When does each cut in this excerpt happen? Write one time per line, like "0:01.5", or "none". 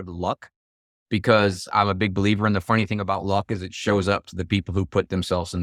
none